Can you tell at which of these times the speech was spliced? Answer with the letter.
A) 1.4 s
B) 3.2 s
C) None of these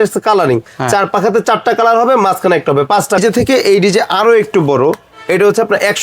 B